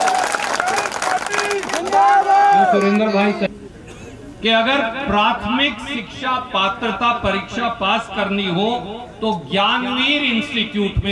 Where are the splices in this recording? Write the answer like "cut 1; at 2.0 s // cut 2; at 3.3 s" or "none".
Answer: cut 1; at 3.5 s